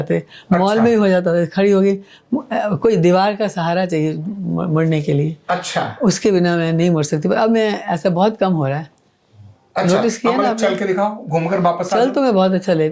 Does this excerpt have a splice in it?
no; 0 cuts

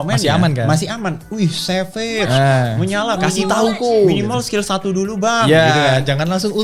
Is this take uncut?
yes; 0 cuts

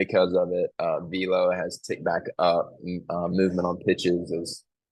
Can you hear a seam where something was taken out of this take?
no; 0 cuts

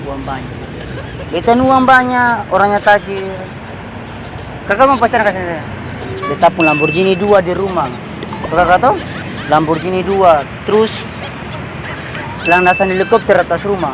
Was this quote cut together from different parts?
yes; 1 cut; at 6.2 s

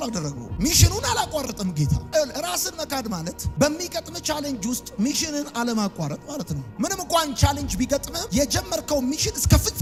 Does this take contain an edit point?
no; 0 cuts

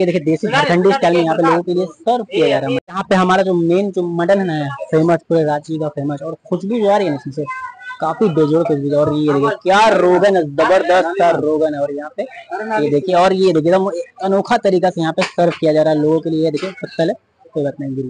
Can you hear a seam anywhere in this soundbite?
no; 0 cuts

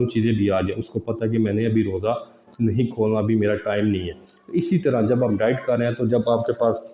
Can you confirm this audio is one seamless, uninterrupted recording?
yes; 0 cuts

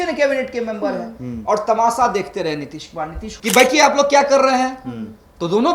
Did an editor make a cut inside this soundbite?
yes; 1 cut; at 3.3 s

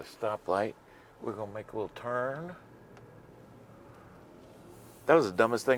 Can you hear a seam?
no; 0 cuts

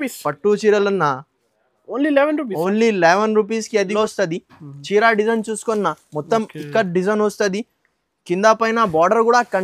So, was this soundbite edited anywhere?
yes; 1 cut; at 3.8 s

